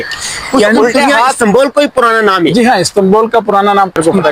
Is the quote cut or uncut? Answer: uncut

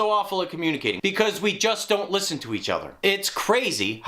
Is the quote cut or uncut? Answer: cut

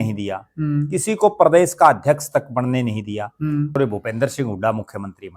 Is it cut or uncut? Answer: cut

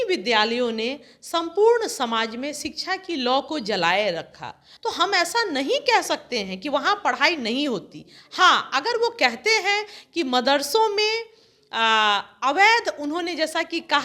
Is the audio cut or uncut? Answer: cut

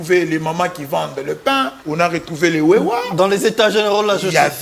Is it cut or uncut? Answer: cut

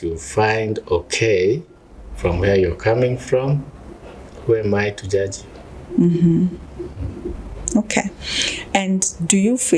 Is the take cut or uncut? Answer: uncut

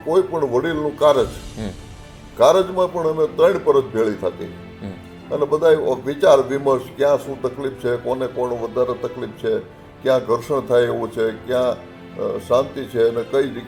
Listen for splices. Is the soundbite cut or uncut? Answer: uncut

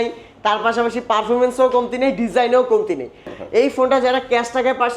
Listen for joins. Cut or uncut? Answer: cut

